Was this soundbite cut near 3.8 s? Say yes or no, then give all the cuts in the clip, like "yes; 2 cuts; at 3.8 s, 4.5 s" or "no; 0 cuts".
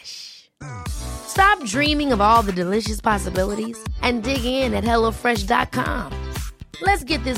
no; 0 cuts